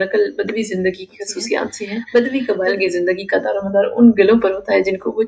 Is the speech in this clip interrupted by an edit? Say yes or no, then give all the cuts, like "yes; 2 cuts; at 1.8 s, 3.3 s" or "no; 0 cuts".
yes; 1 cut; at 2.0 s